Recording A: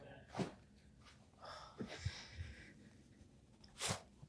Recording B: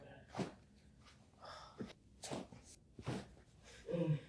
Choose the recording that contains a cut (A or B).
B